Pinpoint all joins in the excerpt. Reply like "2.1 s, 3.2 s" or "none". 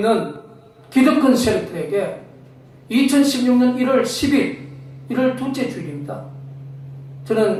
none